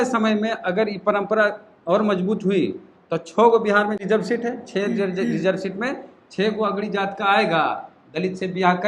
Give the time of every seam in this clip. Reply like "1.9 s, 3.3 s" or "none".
4.0 s